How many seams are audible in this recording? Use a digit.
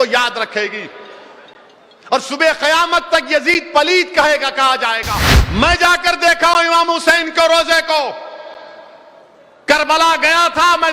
1